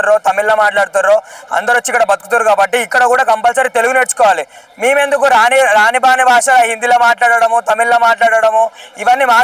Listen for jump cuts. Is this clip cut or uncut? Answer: uncut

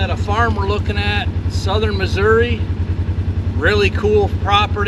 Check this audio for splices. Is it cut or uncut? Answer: uncut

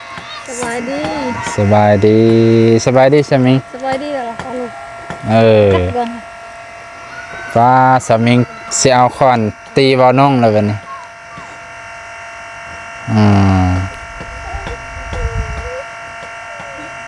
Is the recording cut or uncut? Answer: uncut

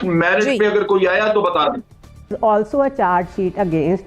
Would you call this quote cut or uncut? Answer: cut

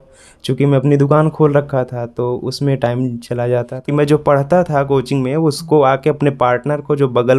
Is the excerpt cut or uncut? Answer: cut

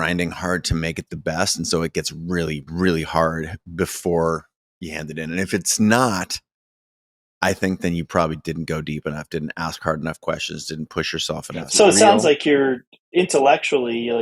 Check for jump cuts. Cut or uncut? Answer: cut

